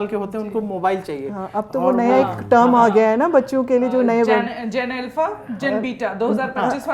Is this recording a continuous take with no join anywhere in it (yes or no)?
yes